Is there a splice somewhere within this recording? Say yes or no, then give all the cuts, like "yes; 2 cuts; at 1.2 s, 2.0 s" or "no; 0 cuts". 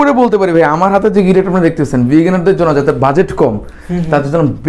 no; 0 cuts